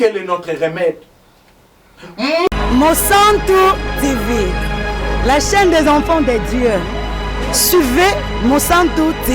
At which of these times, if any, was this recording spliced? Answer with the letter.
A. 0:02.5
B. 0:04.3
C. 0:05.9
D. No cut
A